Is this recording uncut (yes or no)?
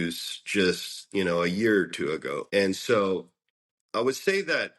no